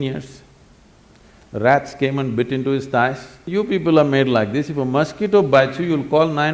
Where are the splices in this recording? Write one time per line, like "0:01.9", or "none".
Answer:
0:03.5